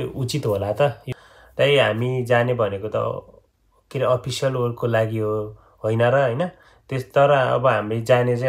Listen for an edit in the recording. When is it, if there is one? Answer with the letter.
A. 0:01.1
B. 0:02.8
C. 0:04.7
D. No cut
A